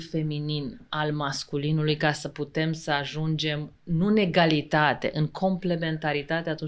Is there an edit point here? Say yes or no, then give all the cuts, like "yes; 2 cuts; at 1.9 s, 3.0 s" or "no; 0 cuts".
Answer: no; 0 cuts